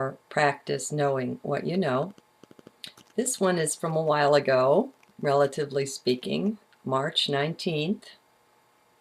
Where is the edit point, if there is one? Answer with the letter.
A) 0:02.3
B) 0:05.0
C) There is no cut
A